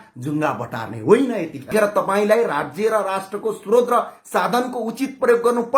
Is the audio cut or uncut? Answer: cut